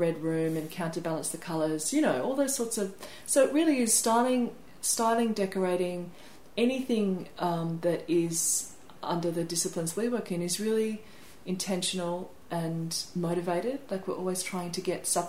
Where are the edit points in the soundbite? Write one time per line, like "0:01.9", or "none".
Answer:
none